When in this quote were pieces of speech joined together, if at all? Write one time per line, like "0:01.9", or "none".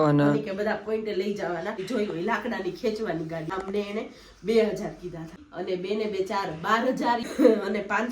0:01.8
0:03.5
0:05.5
0:07.3